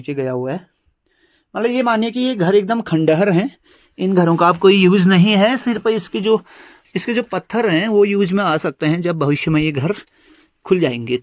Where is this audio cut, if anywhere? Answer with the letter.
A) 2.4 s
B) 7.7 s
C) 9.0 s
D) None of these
D